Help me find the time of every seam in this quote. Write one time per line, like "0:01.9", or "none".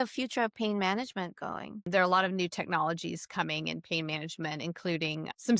0:01.8